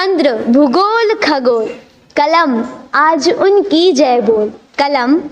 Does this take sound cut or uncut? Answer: uncut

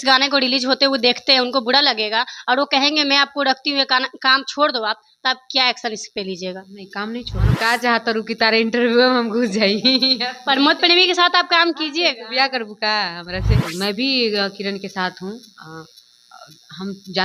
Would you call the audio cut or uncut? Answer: cut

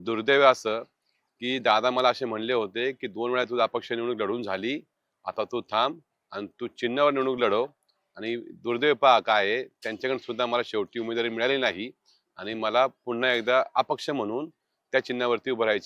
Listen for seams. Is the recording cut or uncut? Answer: uncut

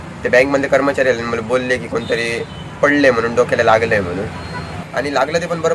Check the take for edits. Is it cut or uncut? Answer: cut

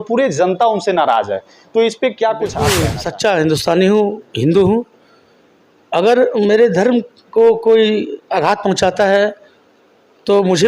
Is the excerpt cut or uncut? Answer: cut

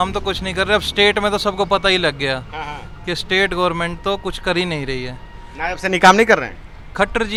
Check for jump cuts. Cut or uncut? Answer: uncut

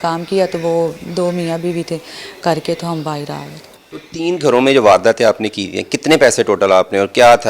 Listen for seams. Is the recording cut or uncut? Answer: uncut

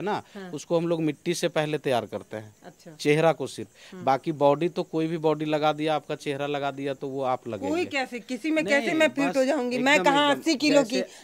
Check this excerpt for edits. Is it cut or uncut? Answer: uncut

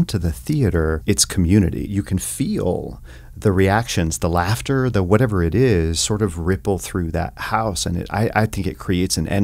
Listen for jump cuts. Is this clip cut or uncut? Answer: cut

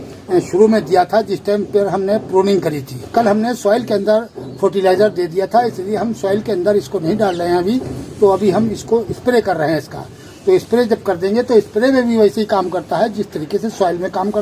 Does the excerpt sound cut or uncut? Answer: cut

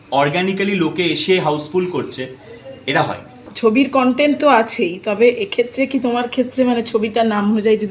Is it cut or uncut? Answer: uncut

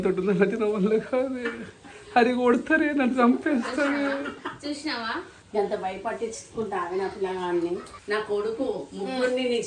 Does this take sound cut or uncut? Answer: cut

